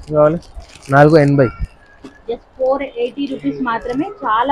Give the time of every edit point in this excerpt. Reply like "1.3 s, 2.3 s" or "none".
none